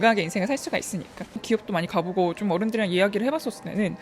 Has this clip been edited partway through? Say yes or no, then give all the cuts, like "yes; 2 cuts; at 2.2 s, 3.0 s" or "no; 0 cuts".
yes; 1 cut; at 1.4 s